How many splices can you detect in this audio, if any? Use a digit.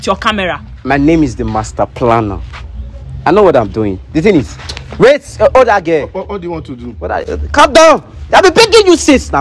0